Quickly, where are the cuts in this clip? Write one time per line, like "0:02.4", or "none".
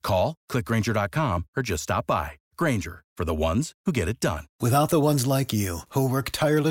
0:04.5